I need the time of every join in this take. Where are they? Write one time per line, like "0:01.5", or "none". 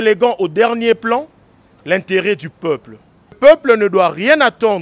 0:03.4